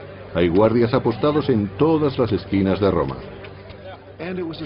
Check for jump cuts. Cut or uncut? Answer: cut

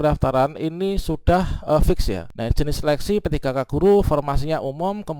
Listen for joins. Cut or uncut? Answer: cut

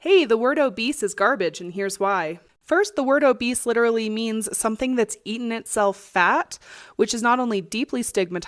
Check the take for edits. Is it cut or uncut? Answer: uncut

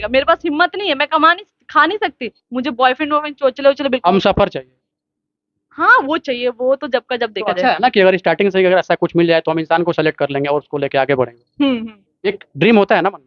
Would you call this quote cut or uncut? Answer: uncut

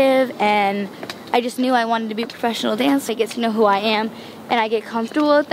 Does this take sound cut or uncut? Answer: cut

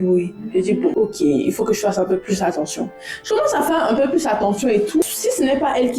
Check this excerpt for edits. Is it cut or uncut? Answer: cut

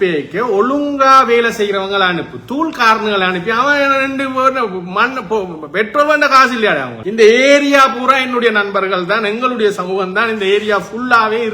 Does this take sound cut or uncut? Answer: cut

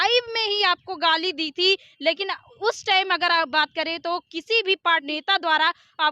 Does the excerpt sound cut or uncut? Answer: cut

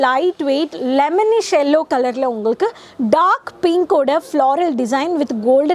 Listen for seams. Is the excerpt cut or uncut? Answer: uncut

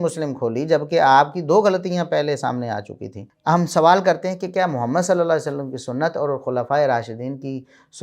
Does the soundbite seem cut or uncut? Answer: cut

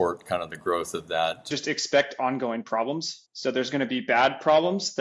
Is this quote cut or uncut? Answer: cut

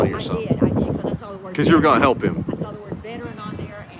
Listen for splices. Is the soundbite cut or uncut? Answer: uncut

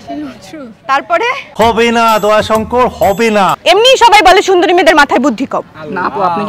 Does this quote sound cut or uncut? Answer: cut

